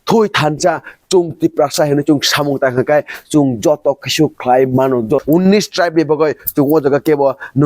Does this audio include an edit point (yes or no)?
yes